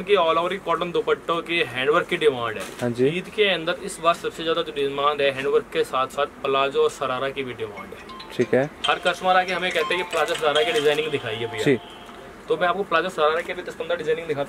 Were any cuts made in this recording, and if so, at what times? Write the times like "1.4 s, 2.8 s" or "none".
none